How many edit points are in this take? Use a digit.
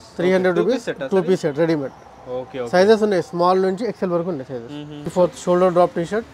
1